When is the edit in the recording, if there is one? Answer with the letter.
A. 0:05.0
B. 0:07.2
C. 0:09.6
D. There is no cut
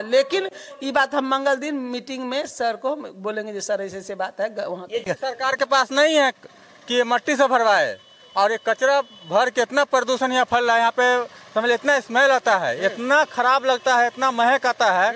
A